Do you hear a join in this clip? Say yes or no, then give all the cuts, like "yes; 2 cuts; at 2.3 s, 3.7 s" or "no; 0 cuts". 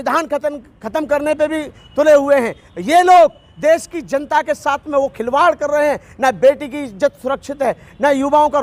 no; 0 cuts